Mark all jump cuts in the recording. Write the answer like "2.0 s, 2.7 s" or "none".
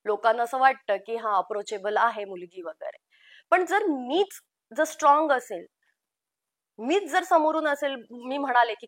none